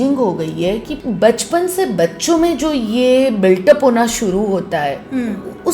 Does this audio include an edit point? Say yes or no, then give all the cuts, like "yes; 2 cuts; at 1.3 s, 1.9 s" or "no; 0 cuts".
yes; 1 cut; at 0.9 s